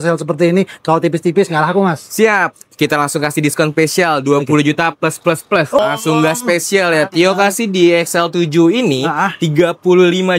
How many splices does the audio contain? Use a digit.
1